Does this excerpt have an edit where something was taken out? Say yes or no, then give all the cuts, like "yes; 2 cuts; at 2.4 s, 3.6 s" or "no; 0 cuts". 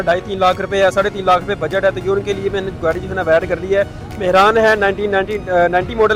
no; 0 cuts